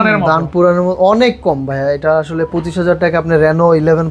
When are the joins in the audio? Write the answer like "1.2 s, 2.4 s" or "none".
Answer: none